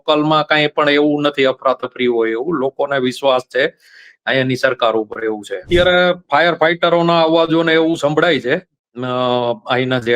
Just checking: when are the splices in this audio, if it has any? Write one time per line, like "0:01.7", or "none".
0:05.7